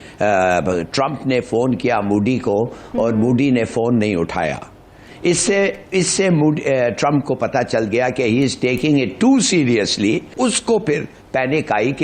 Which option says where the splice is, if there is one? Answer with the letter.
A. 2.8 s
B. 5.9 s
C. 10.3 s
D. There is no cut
C